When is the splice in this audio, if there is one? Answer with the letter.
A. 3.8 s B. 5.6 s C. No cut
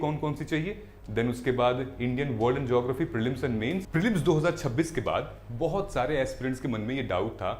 A